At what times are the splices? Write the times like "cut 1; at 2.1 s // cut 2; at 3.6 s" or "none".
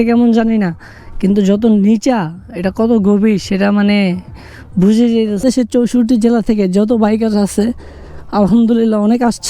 cut 1; at 5.4 s